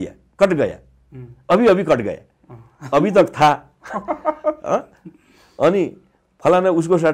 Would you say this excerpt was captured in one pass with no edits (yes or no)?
yes